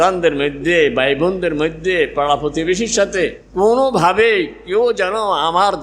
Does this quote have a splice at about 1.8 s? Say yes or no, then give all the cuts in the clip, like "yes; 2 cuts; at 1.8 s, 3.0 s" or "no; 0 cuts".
no; 1 cut; at 3.4 s